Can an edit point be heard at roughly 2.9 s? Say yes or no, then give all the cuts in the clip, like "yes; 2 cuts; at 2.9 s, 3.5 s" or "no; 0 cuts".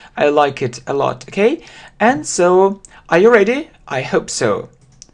yes; 1 cut; at 2.9 s